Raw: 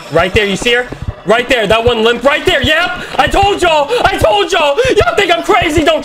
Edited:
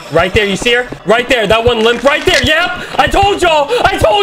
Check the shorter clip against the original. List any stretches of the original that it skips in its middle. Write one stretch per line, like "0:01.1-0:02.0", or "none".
0:00.9-0:01.1